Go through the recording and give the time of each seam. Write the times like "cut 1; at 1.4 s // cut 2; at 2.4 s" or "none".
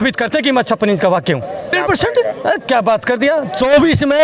cut 1; at 1.8 s